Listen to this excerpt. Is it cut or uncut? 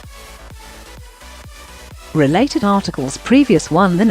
cut